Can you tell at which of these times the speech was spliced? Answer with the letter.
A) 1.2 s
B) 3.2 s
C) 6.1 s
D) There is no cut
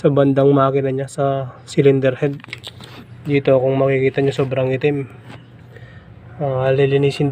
D